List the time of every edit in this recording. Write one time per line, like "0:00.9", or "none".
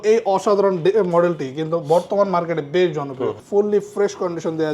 0:03.4